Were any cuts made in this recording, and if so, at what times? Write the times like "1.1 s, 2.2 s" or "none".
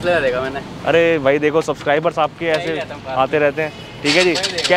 none